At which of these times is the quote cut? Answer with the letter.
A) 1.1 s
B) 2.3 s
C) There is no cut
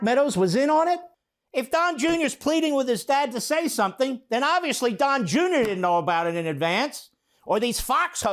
A